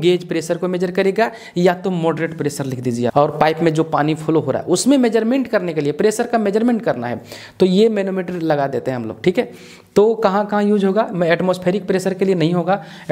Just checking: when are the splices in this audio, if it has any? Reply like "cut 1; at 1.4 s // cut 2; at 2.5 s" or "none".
cut 1; at 3.1 s